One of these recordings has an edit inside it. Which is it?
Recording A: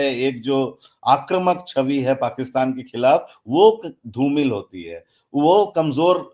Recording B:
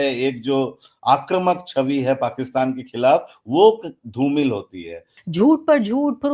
B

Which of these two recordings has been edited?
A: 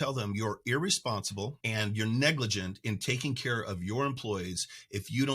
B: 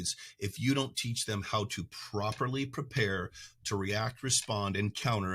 A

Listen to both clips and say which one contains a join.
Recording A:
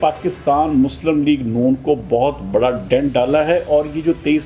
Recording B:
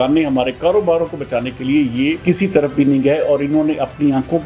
B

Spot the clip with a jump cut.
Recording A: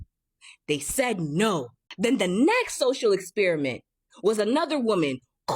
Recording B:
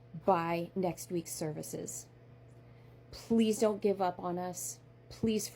A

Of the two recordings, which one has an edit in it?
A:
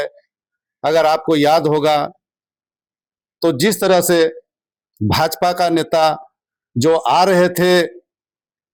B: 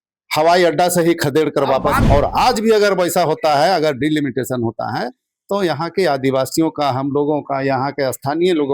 B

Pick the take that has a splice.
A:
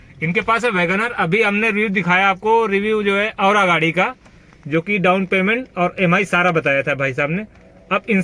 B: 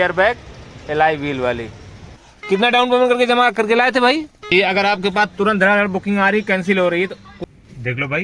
B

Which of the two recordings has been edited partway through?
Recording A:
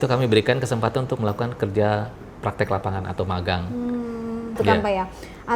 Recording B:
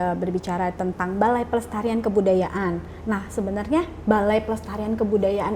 A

